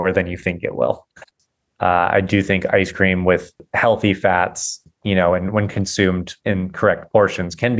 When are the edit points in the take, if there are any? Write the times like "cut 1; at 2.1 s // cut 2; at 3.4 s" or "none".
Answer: cut 1; at 1.2 s // cut 2; at 3.7 s // cut 3; at 4.8 s // cut 4; at 6.3 s